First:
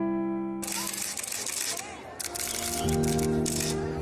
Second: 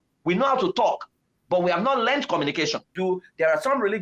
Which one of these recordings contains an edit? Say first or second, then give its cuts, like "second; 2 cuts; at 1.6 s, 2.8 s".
second; 1 cut; at 2.9 s